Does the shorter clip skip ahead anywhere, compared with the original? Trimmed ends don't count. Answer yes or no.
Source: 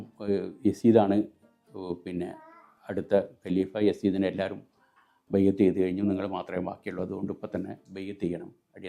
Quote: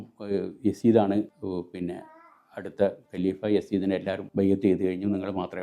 yes